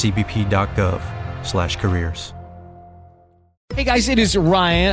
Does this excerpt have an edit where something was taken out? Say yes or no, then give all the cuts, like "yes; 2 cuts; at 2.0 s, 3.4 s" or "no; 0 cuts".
yes; 1 cut; at 3.5 s